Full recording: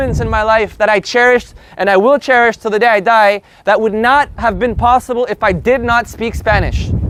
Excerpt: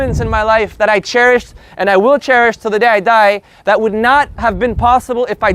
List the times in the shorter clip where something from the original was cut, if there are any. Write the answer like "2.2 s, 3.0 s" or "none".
none